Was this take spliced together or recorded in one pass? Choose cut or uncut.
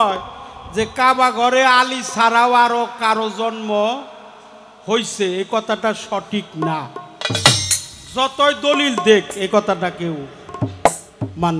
uncut